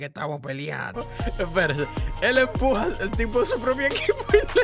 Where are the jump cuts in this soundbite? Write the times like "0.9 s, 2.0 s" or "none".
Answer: 1.0 s